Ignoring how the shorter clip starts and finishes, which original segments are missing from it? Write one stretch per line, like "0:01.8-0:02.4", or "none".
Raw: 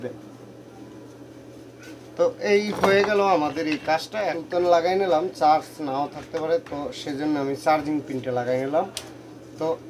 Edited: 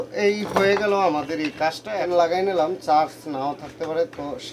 0:04.3-0:04.6

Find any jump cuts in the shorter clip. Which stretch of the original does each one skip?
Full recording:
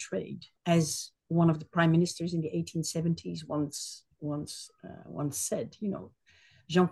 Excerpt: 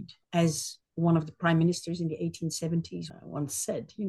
0:03.4-0:04.9

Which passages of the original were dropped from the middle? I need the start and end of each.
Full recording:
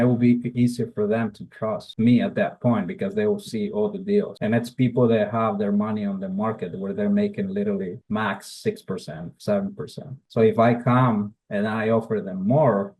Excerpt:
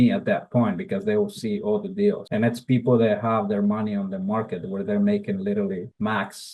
none

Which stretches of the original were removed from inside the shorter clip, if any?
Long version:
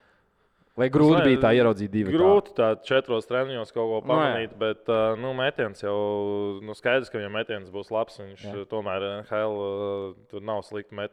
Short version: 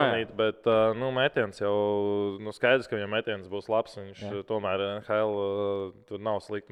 none

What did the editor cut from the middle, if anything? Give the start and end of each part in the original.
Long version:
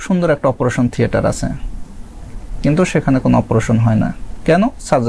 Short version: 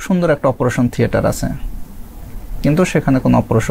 none

